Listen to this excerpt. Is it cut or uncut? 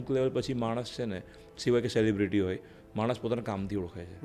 uncut